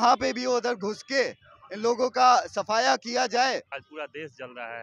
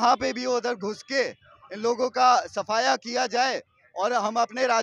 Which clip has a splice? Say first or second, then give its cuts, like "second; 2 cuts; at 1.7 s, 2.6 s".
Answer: first; 1 cut; at 3.8 s